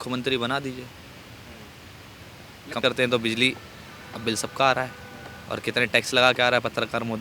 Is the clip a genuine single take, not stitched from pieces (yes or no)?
no